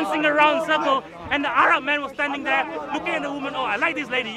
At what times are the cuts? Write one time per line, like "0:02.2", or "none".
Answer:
none